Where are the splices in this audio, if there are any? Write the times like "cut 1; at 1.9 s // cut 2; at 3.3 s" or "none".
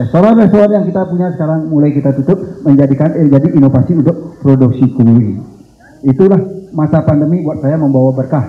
none